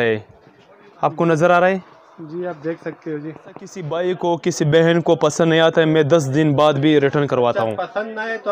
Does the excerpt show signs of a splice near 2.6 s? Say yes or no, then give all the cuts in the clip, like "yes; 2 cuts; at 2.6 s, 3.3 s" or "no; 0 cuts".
no; 1 cut; at 3.8 s